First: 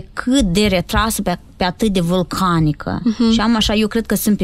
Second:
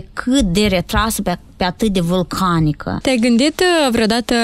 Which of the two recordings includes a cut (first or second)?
second